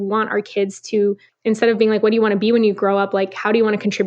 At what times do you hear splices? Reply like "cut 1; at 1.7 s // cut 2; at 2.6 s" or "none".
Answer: cut 1; at 1.3 s